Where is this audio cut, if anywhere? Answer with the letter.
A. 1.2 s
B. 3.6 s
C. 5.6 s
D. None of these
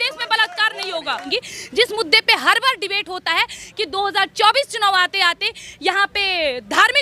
A